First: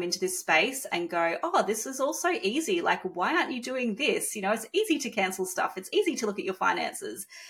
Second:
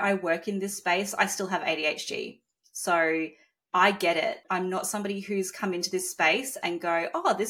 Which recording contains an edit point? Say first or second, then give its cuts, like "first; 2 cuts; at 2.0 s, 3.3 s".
second; 1 cut; at 4.4 s